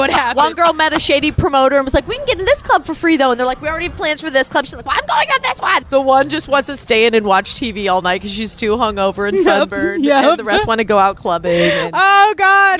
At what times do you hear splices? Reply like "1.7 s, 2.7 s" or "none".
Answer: 1.3 s, 5.8 s, 6.8 s